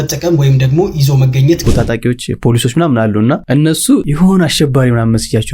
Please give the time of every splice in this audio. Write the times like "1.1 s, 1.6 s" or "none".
1.6 s, 4.1 s